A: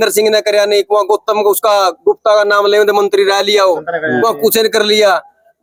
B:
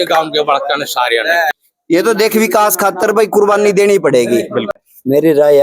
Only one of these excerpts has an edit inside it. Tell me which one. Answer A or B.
B